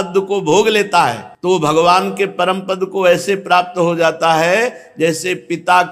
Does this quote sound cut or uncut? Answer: cut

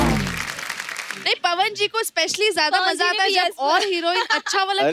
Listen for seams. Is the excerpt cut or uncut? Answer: cut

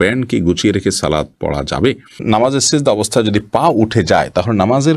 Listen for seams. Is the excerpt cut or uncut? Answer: cut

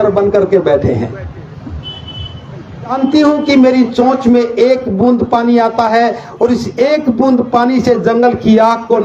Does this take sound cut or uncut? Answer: cut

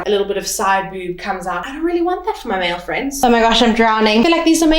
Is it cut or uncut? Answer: cut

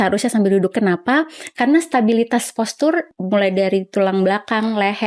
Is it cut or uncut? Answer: cut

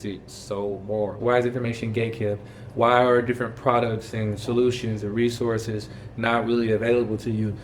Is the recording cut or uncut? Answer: cut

